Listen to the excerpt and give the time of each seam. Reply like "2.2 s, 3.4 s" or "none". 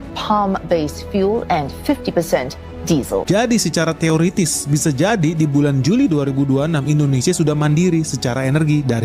3.2 s